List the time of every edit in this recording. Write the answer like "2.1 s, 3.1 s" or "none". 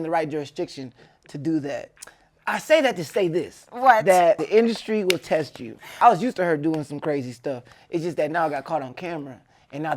1.9 s, 4.4 s, 5.9 s